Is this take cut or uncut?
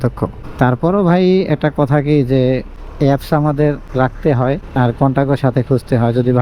uncut